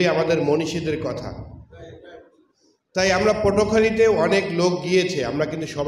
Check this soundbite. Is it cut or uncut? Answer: uncut